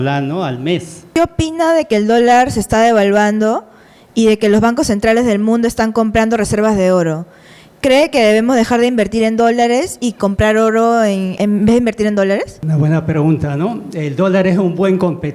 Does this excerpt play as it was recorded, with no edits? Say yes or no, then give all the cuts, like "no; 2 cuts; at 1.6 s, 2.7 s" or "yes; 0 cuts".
no; 3 cuts; at 1.0 s, 11.3 s, 12.6 s